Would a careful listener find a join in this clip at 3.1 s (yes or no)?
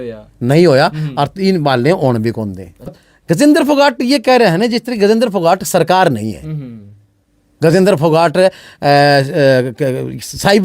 yes